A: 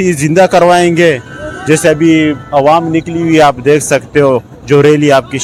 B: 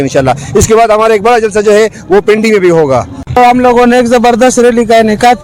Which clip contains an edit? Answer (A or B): B